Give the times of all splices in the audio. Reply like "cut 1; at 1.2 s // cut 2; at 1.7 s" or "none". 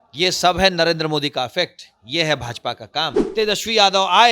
cut 1; at 3.2 s